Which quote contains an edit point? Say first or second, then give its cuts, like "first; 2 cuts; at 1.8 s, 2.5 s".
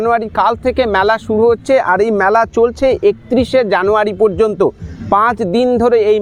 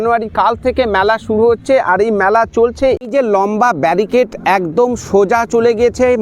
second; 1 cut; at 3.0 s